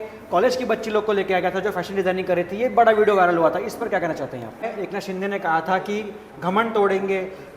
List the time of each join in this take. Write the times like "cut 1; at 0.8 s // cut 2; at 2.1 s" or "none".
cut 1; at 4.7 s